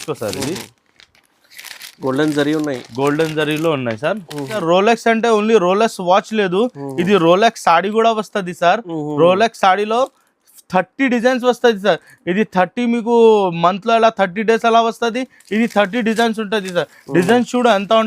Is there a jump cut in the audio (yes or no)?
yes